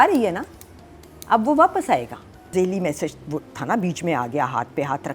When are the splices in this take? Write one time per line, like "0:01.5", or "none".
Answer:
0:02.5